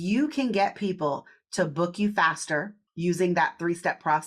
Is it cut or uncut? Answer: cut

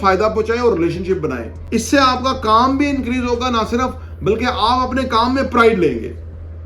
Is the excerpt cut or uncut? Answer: cut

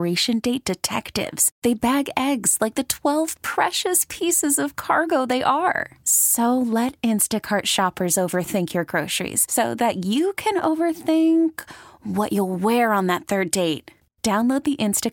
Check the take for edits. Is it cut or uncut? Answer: uncut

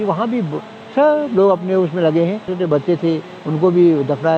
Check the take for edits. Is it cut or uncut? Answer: cut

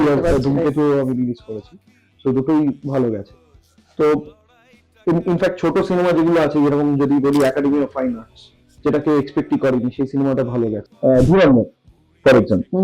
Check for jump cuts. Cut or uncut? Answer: cut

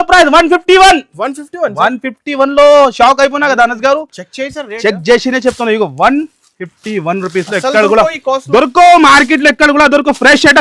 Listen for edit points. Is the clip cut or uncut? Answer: uncut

